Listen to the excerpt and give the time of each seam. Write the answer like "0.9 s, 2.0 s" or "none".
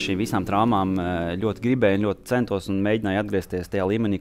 none